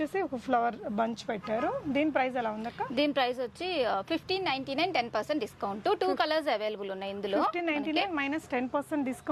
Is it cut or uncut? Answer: uncut